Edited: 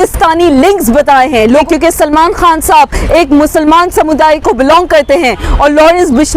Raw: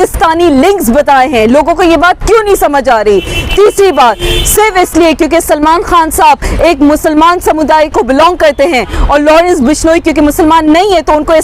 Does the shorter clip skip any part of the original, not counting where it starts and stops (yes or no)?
yes